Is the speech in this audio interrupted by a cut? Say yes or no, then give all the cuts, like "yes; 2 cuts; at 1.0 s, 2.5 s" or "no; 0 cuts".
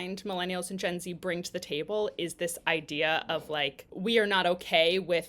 yes; 1 cut; at 3.8 s